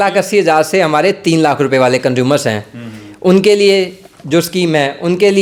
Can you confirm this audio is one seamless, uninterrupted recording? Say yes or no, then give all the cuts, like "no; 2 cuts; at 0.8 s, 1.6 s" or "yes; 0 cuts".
yes; 0 cuts